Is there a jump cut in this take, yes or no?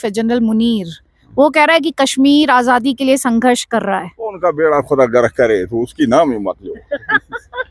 no